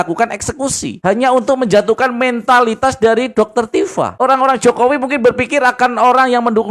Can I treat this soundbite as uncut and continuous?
no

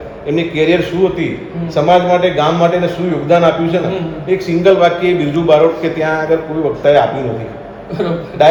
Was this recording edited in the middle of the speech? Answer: no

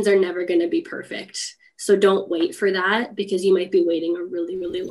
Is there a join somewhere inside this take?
no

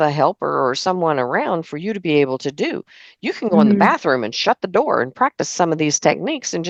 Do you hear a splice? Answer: no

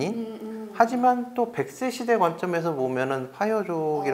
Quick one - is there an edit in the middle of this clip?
no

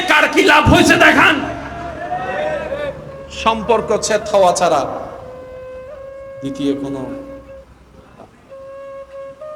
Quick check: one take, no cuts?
no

